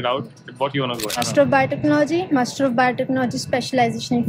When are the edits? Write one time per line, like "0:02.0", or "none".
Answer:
0:01.1

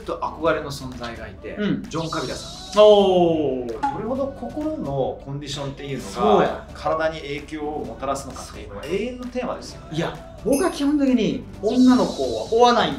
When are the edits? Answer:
0:03.7
0:10.2

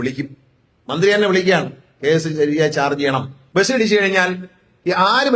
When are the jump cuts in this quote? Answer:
0:03.4

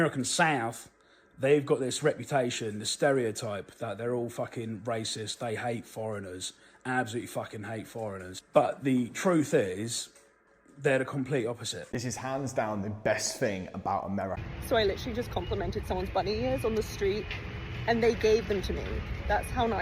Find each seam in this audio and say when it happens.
0:08.3
0:11.7
0:14.5

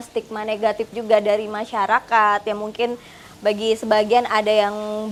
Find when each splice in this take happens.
none

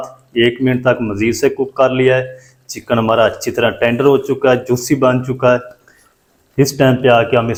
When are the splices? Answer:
none

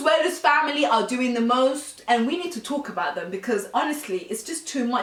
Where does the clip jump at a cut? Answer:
none

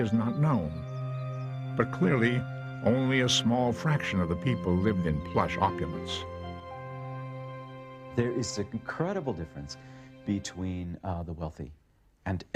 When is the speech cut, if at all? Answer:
0:11.3

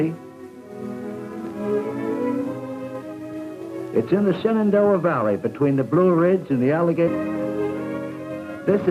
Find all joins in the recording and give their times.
none

